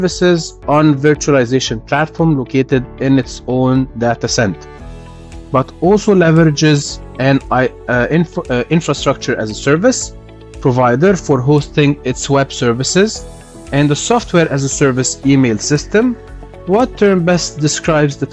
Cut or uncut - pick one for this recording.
uncut